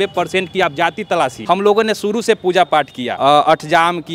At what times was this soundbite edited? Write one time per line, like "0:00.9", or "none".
0:01.4
0:03.0